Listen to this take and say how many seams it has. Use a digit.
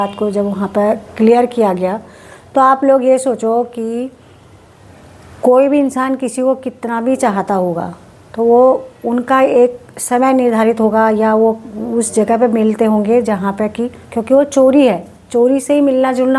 0